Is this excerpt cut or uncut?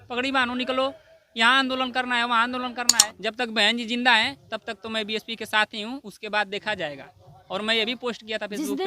cut